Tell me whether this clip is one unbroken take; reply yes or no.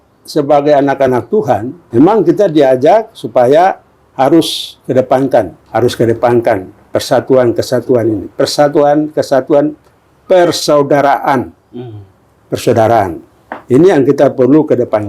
no